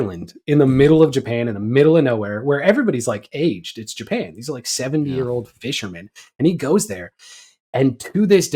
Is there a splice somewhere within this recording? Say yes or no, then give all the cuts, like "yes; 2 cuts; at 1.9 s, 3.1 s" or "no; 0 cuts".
no; 0 cuts